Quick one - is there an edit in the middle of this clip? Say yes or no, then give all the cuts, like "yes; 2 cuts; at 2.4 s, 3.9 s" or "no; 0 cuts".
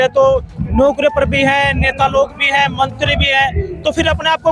no; 0 cuts